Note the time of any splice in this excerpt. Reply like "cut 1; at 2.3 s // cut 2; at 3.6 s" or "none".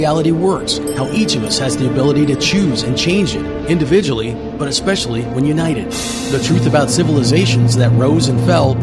none